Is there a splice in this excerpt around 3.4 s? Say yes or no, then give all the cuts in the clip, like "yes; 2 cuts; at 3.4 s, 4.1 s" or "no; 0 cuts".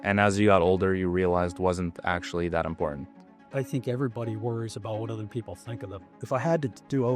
no; 1 cut; at 6.1 s